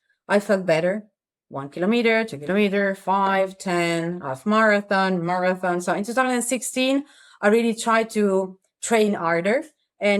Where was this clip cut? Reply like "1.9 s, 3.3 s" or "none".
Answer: none